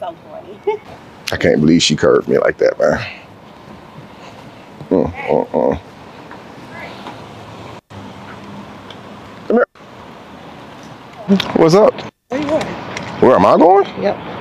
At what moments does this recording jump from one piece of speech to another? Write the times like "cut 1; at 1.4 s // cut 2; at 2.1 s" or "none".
cut 1; at 0.8 s // cut 2; at 11.3 s